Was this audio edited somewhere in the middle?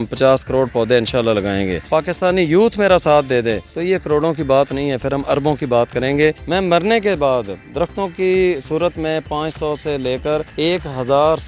yes; 4 cuts; at 1.9 s, 3.7 s, 6.4 s, 10.5 s

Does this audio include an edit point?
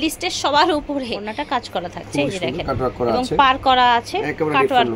yes; 1 cut; at 1.0 s

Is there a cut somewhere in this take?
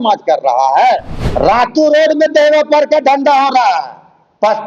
yes; 1 cut; at 1.2 s

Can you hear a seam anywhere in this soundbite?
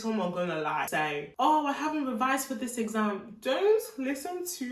yes; 1 cut; at 1.1 s

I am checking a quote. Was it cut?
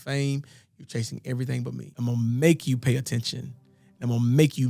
yes; 1 cut; at 1.8 s

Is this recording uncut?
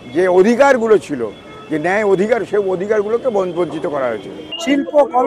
no; 1 cut; at 4.4 s

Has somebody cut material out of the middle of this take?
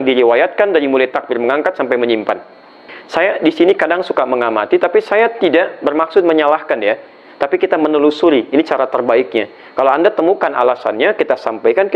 yes; 1 cut; at 2.9 s

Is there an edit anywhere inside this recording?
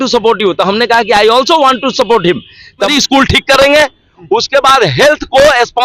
yes; 1 cut; at 2.9 s

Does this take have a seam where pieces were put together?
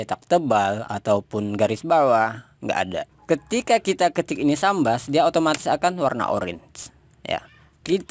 yes; 1 cut; at 3.1 s

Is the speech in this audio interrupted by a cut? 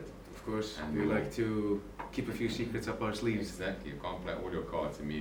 no; 0 cuts

